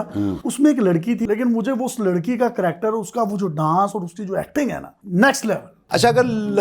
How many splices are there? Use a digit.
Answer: 3